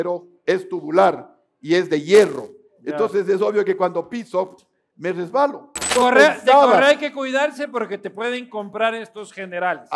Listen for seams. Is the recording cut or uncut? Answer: cut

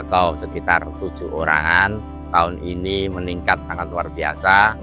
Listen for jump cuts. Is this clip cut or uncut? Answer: cut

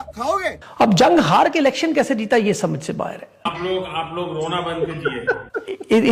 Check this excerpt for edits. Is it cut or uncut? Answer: uncut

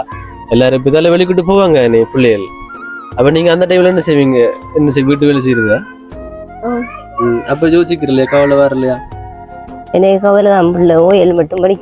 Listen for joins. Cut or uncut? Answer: uncut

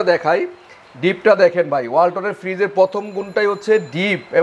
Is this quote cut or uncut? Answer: uncut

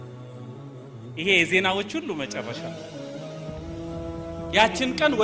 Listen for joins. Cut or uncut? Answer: cut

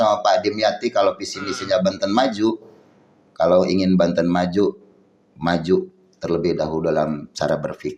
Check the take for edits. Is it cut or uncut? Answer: uncut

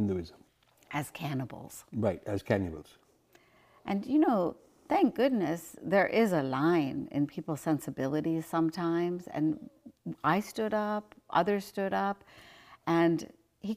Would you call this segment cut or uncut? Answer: uncut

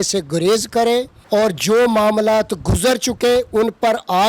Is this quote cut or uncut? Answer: cut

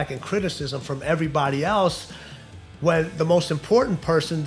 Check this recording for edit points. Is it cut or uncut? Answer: uncut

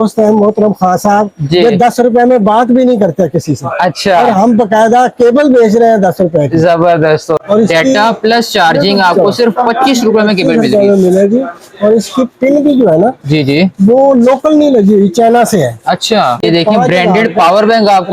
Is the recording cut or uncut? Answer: cut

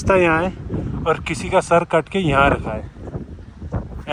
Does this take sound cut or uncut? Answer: uncut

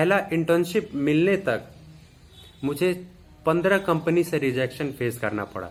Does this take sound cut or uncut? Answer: uncut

